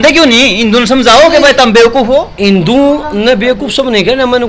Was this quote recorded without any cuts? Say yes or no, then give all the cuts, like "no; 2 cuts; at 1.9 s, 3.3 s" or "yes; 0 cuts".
yes; 0 cuts